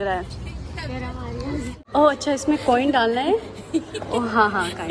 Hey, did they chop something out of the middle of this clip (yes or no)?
yes